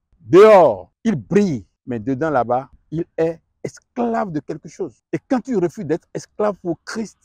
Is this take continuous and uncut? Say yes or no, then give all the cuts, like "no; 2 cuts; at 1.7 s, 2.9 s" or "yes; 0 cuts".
no; 4 cuts; at 0.9 s, 1.7 s, 2.8 s, 5.0 s